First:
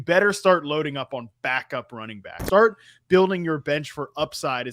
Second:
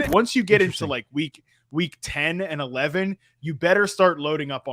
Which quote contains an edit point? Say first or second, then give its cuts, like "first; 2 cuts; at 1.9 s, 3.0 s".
first; 1 cut; at 2.3 s